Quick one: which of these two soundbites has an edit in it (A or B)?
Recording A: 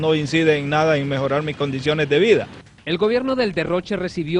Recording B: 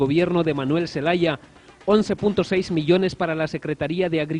A